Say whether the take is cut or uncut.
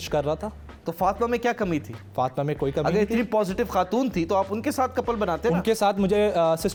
uncut